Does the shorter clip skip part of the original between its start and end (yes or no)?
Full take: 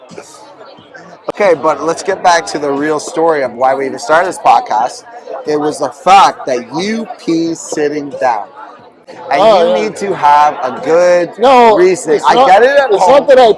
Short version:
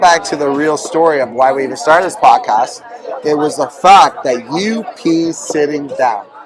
no